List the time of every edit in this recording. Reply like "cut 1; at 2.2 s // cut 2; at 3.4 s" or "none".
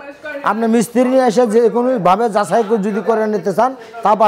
none